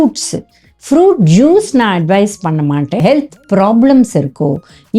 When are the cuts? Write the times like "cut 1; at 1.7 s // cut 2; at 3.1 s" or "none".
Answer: cut 1; at 3.0 s